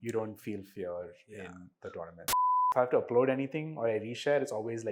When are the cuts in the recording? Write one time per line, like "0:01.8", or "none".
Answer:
0:02.5

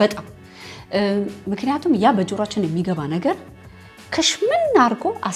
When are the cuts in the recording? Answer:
none

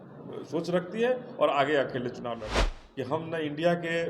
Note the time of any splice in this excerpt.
0:02.4

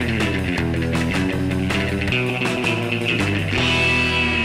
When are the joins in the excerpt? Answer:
none

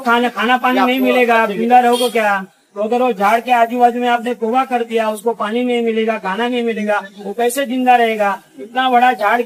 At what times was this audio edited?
none

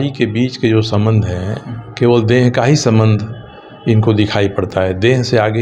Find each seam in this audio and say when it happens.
none

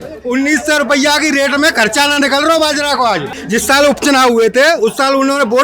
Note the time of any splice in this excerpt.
0:03.4

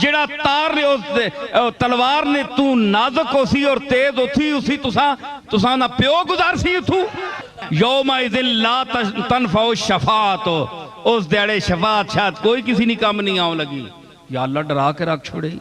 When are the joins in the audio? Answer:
0:07.6

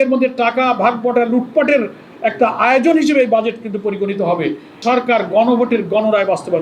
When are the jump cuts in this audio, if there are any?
0:04.7

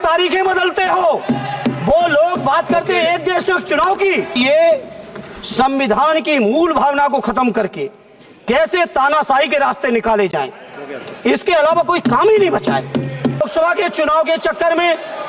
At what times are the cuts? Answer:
0:04.3
0:13.4

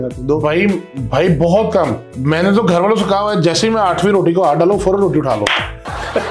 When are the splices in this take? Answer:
0:02.1

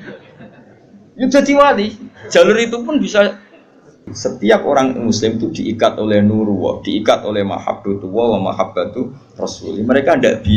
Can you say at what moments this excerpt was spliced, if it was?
0:04.1

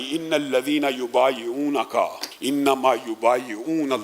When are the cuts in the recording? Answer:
0:02.3

